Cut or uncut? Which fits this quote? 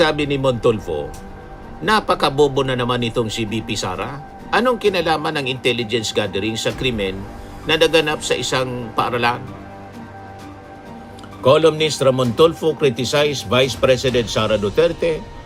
uncut